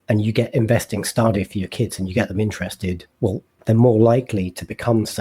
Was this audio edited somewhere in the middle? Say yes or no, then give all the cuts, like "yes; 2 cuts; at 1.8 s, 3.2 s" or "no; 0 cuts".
yes; 1 cut; at 3.1 s